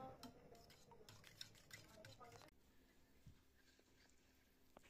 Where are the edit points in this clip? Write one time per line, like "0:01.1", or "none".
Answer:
none